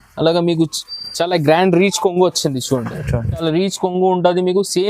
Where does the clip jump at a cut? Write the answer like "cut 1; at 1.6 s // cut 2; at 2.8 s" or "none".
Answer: cut 1; at 3.4 s